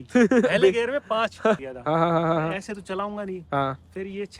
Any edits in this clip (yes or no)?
yes